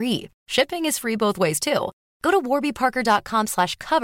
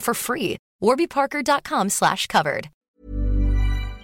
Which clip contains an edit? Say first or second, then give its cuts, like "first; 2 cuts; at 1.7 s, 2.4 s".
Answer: second; 1 cut; at 2.8 s